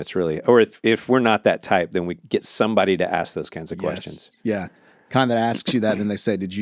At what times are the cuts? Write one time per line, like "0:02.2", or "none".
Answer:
none